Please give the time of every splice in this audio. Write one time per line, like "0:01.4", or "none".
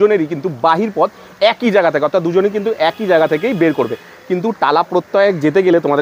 none